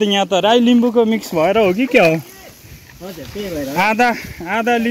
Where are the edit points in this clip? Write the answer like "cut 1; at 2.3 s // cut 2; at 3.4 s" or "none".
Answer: none